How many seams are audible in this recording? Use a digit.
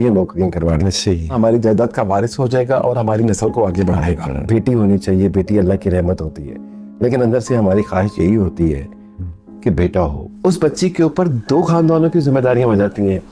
3